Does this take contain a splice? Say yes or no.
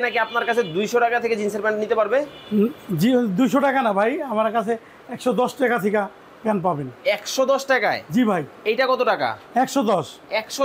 no